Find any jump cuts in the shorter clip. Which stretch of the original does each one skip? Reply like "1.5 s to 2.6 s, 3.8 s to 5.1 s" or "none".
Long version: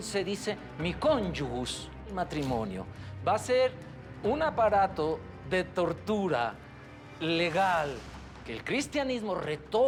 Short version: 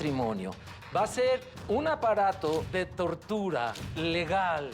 3.8 s to 4.1 s, 5.2 s to 5.5 s, 6.6 s to 7.1 s